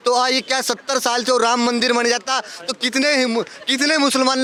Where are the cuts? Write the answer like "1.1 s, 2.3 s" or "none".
none